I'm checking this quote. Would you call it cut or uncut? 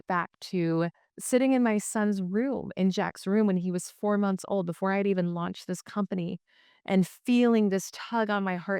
cut